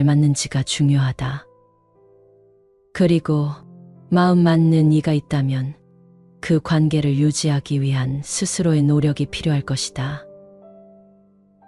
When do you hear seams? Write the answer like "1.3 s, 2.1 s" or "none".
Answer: 1.4 s, 2.9 s, 10.2 s